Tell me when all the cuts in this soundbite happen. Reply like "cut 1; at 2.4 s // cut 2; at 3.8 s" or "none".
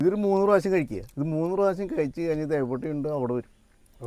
cut 1; at 1.1 s